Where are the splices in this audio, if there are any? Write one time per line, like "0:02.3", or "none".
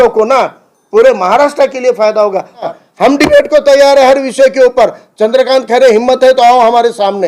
0:02.6

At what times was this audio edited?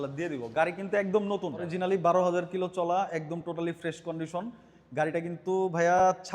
0:01.6

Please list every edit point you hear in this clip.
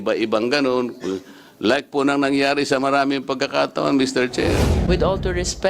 0:04.7

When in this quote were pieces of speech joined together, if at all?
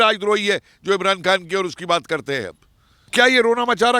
0:03.1

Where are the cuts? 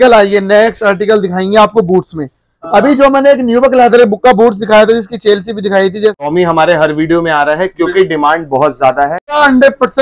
0:06.3
0:09.3

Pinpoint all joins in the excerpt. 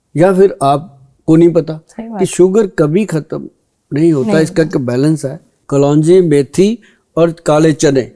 0:05.6

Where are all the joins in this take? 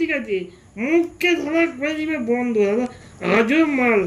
none

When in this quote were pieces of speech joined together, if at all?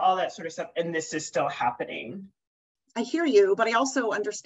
0:02.6

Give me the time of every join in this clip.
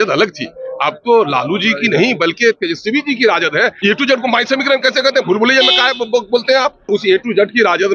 0:03.7
0:06.9

